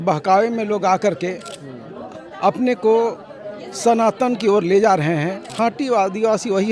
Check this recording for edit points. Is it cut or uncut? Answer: cut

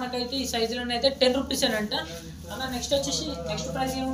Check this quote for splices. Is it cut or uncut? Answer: uncut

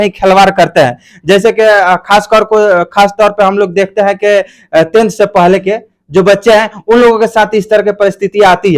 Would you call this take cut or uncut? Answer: uncut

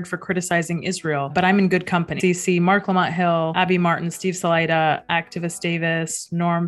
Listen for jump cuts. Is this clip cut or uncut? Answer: cut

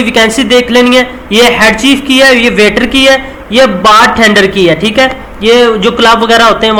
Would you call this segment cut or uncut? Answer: uncut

